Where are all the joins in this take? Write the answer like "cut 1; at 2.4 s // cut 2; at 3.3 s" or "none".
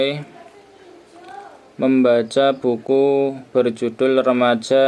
none